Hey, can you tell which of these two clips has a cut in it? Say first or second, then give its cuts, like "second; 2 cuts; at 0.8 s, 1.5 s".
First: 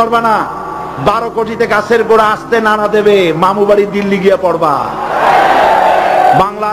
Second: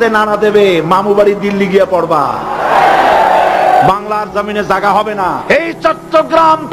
second; 1 cut; at 5.5 s